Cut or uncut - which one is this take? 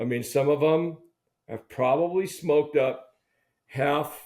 uncut